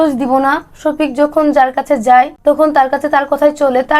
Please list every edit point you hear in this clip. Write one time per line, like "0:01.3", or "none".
0:02.3